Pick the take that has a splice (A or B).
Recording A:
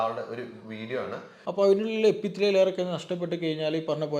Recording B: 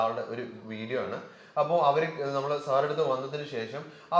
A